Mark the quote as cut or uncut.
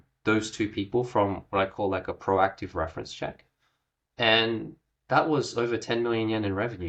uncut